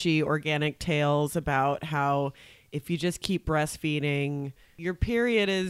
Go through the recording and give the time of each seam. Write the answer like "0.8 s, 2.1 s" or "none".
4.7 s